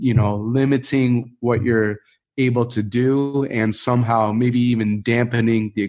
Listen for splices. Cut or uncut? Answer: uncut